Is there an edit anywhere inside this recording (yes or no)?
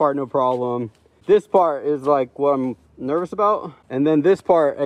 no